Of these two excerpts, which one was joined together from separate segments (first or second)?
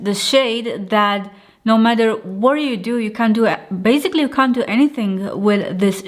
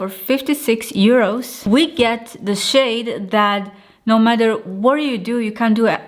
second